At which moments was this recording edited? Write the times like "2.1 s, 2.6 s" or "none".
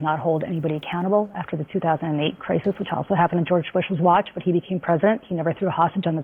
5.0 s